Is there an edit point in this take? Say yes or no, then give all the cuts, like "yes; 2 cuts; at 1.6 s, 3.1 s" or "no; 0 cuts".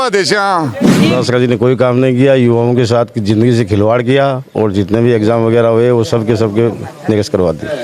yes; 1 cut; at 1.1 s